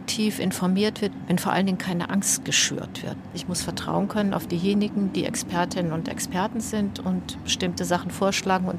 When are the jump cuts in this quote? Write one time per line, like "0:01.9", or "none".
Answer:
0:01.1
0:03.2